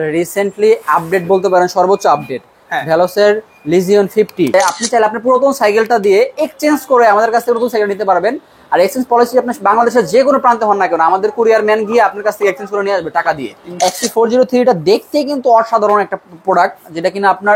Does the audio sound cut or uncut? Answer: cut